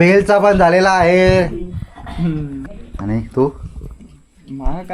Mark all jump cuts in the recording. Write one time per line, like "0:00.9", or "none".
0:02.6